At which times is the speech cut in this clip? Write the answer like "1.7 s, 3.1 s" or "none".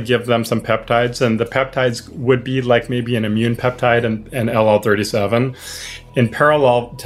5.9 s

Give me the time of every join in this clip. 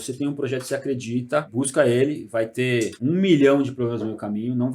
1.5 s, 2.9 s

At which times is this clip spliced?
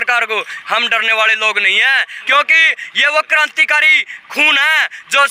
2.1 s

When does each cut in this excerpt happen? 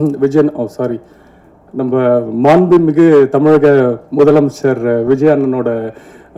none

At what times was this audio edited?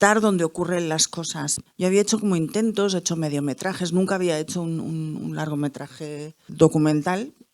1.5 s, 6.5 s

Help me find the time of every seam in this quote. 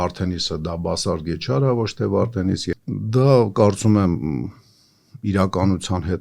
2.7 s

